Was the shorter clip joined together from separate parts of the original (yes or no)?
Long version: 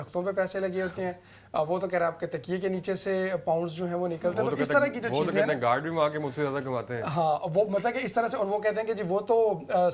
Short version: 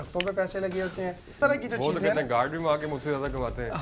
yes